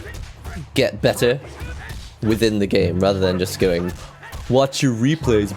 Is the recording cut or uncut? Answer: uncut